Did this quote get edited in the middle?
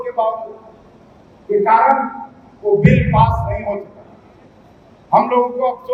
no; 0 cuts

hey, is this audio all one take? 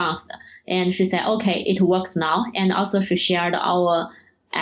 yes; 0 cuts

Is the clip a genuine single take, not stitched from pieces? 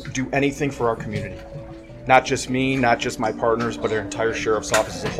yes; 0 cuts

